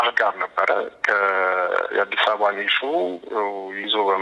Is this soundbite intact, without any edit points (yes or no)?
yes